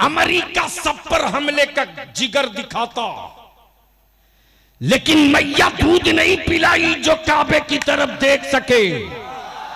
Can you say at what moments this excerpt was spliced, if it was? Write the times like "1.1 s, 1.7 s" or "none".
none